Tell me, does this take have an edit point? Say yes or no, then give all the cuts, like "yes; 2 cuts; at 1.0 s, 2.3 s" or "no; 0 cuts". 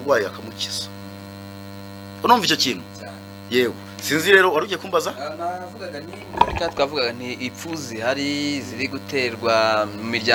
no; 0 cuts